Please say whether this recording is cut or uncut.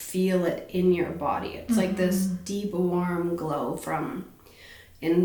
uncut